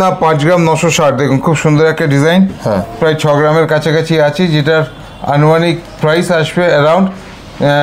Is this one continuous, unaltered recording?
yes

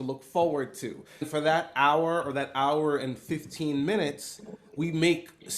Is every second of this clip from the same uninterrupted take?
no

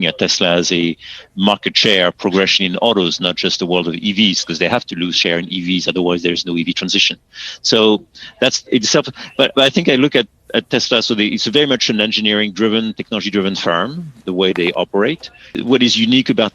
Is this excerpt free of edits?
no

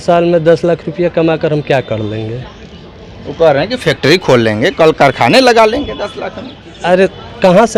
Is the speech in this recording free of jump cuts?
yes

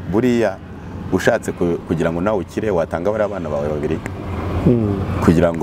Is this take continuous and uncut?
yes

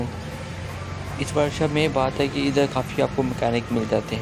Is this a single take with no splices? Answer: yes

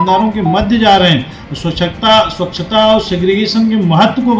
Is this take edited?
no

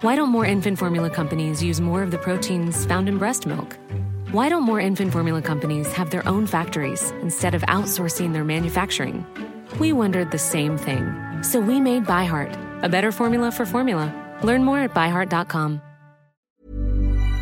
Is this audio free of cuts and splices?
no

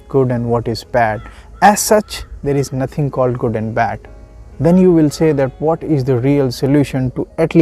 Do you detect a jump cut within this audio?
no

